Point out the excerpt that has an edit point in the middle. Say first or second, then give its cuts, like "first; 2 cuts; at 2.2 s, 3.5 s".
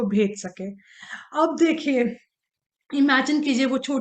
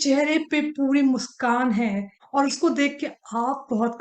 second; 1 cut; at 2.1 s